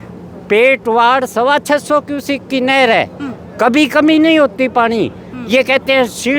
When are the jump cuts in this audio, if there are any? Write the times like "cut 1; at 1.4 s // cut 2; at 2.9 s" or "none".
none